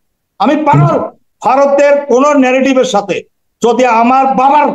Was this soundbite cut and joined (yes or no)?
yes